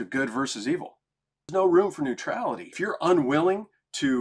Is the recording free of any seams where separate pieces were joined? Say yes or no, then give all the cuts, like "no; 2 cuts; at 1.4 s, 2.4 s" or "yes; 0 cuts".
no; 2 cuts; at 1.5 s, 2.8 s